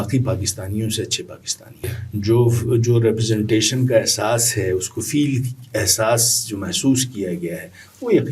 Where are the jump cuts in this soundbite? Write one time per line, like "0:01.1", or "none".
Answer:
0:02.0

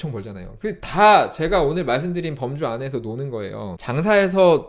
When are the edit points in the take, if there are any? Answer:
0:03.8

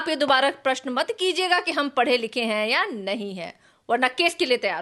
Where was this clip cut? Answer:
none

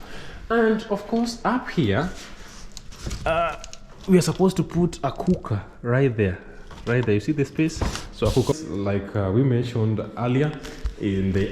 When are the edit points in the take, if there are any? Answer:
0:08.5

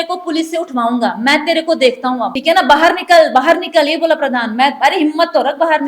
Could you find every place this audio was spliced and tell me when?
0:02.3

